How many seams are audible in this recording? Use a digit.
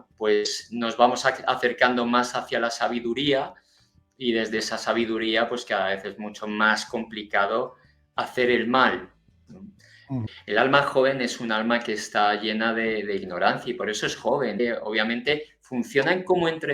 2